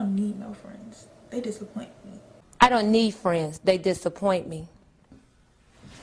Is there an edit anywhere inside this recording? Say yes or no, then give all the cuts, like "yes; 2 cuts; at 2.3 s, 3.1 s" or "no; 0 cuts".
no; 0 cuts